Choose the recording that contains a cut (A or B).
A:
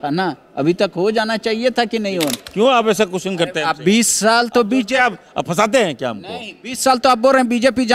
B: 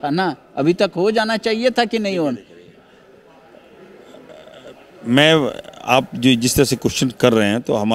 A